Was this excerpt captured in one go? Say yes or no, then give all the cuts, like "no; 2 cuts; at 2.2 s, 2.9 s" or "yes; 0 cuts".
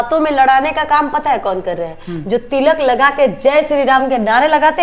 yes; 0 cuts